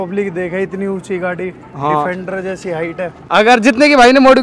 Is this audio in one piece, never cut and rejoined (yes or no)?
no